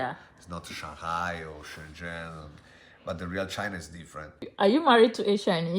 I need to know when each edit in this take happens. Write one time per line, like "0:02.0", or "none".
0:04.4